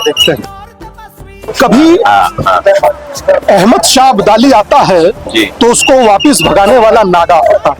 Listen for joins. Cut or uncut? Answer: uncut